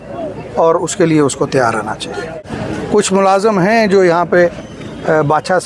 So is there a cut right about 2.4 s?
yes; 1 cut; at 2.4 s

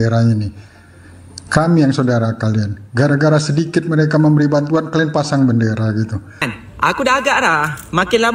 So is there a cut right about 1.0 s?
no; 1 cut; at 6.6 s

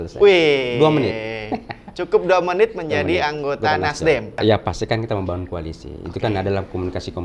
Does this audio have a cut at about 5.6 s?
no; 1 cut; at 4.4 s

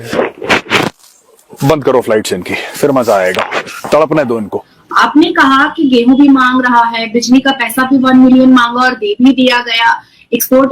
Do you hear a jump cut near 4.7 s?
yes; 1 cut; at 4.7 s

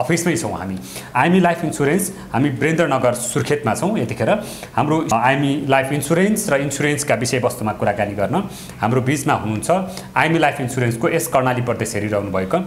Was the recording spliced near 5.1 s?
yes; 1 cut; at 5.1 s

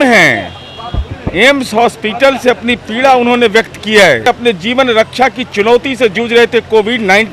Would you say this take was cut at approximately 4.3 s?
yes; 1 cut; at 4.3 s

